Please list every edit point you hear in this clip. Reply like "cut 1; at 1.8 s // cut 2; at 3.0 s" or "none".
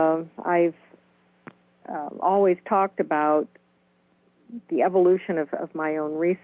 cut 1; at 2.9 s